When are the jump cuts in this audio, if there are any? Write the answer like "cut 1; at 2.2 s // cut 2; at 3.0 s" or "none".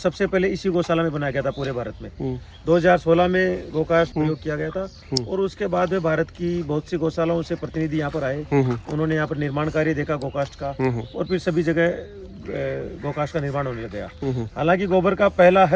none